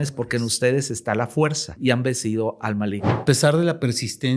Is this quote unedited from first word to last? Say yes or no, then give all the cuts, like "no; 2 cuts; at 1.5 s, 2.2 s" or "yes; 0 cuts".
no; 2 cuts; at 1.7 s, 3.2 s